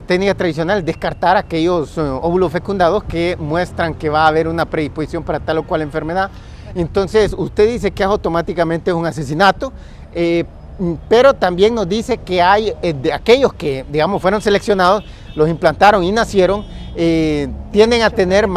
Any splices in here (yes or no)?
yes